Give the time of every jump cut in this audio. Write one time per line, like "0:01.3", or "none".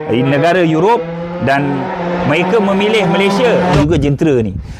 0:03.8